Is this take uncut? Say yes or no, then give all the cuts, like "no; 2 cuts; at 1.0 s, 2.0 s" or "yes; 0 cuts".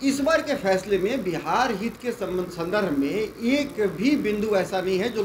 yes; 0 cuts